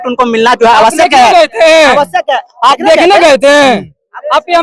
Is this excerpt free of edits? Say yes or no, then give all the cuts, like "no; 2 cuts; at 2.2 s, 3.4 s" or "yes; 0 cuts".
yes; 0 cuts